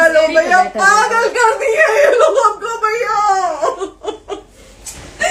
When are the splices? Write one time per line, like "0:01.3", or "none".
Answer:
none

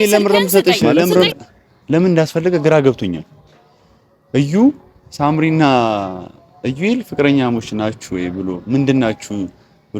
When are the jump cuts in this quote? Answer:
0:01.3

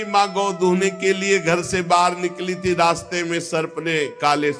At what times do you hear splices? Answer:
none

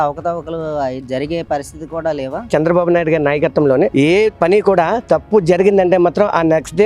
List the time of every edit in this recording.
0:02.5

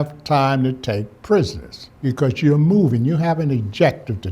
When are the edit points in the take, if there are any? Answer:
0:02.0

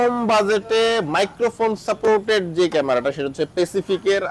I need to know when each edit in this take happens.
none

